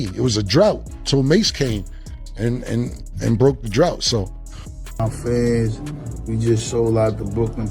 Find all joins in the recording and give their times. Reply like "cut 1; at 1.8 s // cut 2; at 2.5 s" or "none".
cut 1; at 4.7 s